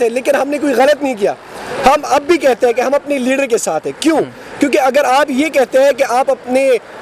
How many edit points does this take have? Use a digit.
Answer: 0